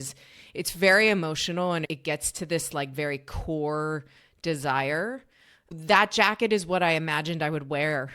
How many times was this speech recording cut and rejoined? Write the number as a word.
one